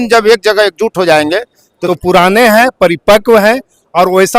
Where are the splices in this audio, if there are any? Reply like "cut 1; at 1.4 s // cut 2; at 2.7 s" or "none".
cut 1; at 1.7 s